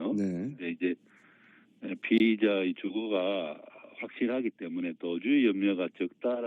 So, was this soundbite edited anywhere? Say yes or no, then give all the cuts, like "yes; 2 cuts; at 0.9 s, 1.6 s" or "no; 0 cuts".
no; 0 cuts